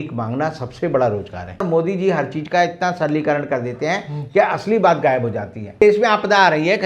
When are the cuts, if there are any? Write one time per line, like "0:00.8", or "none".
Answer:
0:01.6
0:05.8